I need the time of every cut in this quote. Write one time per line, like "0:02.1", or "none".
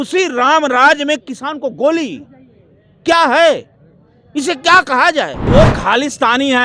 0:05.5

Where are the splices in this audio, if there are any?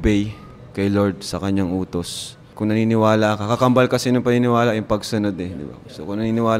0:02.5

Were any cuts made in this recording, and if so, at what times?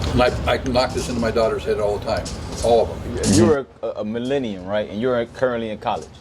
0:03.4

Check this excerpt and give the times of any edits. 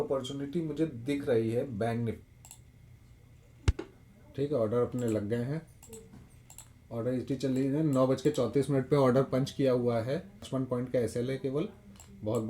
0:02.2
0:10.4

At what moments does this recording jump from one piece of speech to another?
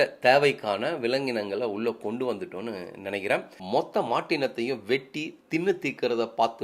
0:03.5

